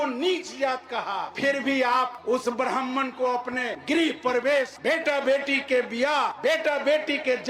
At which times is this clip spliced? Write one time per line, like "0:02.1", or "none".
0:01.3
0:02.2
0:03.7
0:04.7
0:06.3